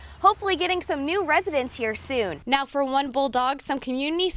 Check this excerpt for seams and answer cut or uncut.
cut